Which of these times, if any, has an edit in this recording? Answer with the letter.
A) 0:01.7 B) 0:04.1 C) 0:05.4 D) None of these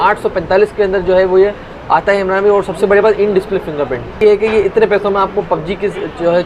B